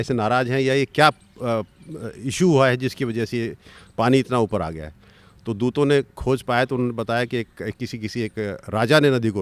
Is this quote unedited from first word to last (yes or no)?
yes